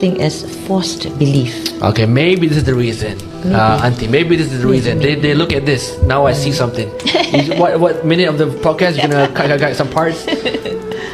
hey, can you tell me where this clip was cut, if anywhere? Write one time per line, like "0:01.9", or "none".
none

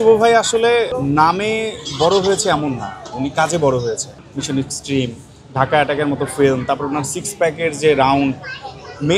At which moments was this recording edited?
0:00.9
0:04.3

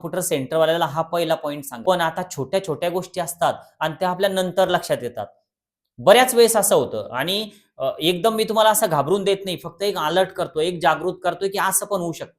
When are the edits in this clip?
0:01.7

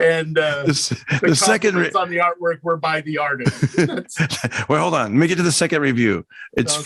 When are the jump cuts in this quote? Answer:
none

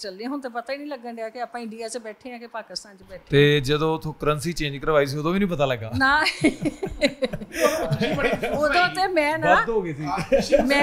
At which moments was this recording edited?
none

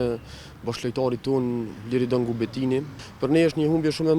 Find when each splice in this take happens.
0:03.1

